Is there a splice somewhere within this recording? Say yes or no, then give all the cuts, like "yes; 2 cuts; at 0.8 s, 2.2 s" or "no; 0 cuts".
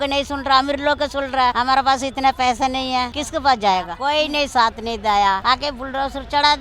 yes; 4 cuts; at 1.5 s, 3.2 s, 3.9 s, 5.4 s